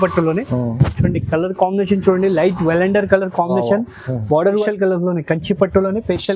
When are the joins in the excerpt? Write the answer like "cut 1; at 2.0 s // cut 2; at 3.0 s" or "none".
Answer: cut 1; at 4.6 s